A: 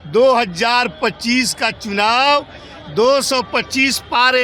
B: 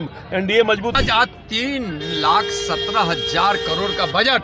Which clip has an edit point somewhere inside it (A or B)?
B